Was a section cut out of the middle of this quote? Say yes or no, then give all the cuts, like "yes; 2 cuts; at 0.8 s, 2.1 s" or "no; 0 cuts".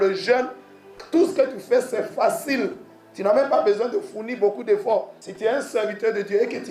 yes; 1 cut; at 5.2 s